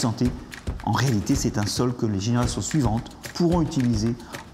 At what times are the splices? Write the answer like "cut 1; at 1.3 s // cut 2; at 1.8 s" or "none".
none